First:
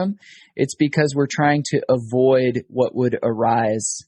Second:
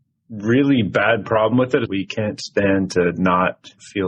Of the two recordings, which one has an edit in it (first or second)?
second